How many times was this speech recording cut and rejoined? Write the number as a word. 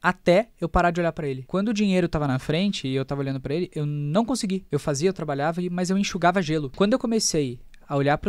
three